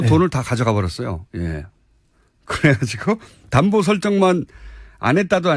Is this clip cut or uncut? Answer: uncut